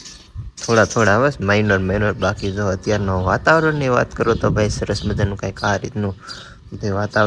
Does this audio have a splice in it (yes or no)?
no